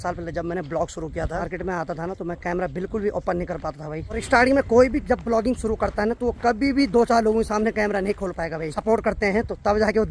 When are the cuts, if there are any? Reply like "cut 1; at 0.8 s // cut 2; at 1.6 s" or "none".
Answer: cut 1; at 1.5 s // cut 2; at 4.2 s // cut 3; at 8.7 s